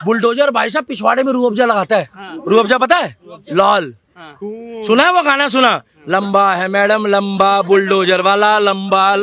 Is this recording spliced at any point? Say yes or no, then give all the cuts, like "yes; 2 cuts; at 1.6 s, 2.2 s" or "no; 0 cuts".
no; 0 cuts